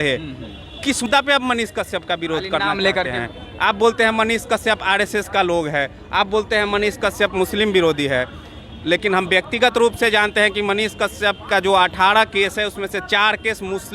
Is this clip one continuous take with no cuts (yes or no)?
no